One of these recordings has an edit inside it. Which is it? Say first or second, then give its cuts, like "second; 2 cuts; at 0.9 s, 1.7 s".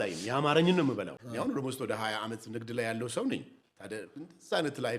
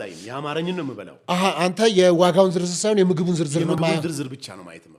first; 1 cut; at 1.1 s